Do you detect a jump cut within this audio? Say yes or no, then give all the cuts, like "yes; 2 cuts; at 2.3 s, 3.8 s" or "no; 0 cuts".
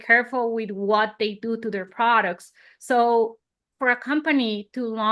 no; 0 cuts